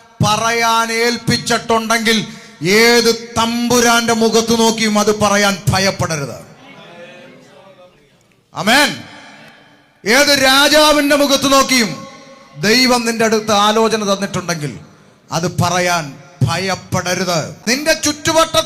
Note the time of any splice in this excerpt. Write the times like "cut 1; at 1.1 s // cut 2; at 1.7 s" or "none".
cut 1; at 17.5 s